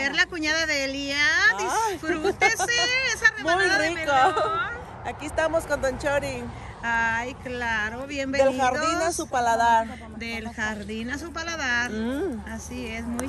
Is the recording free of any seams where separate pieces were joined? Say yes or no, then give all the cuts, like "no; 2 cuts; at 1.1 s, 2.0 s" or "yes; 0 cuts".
yes; 0 cuts